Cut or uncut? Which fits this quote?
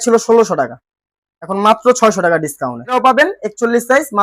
cut